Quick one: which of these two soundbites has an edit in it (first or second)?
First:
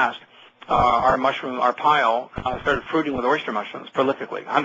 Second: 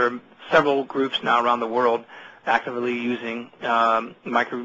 first